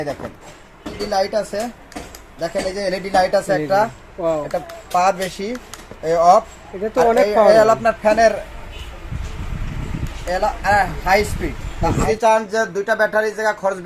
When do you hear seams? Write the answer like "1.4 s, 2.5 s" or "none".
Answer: 1.0 s, 12.1 s